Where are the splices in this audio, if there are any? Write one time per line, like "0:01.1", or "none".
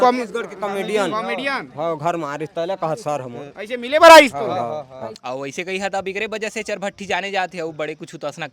0:05.1